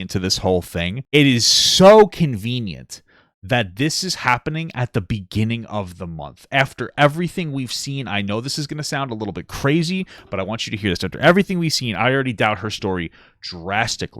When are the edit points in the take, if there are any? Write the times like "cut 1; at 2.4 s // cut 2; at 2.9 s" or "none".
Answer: cut 1; at 1.0 s